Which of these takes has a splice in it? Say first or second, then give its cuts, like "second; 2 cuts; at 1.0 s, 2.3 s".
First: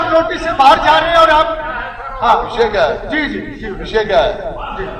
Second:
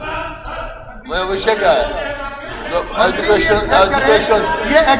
first; 1 cut; at 1.6 s